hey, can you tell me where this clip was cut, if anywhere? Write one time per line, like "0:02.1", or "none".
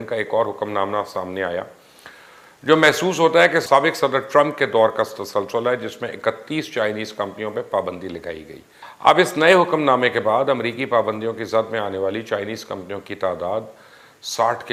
none